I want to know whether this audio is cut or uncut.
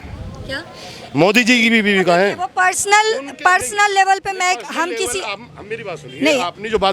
uncut